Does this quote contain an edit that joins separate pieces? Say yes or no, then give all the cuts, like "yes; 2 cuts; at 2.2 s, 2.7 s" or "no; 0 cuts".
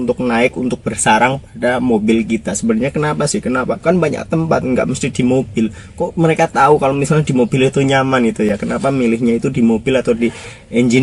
no; 0 cuts